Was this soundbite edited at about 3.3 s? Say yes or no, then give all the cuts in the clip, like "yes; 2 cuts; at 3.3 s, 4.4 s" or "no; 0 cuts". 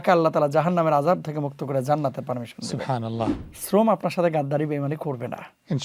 yes; 1 cut; at 3.3 s